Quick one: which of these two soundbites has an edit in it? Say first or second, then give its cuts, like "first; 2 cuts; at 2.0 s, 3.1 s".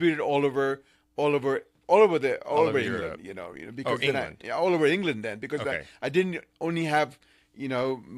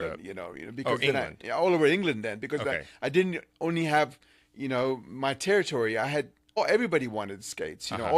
second; 1 cut; at 6.4 s